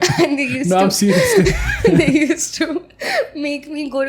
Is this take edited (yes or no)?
no